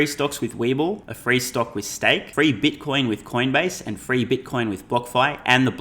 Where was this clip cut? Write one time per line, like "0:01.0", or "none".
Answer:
0:01.1
0:02.3